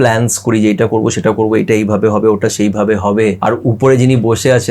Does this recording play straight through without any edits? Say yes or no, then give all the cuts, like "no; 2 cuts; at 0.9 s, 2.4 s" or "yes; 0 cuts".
no; 1 cut; at 3.4 s